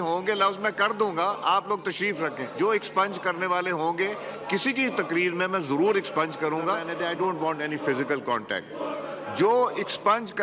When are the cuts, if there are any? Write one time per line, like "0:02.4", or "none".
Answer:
0:06.9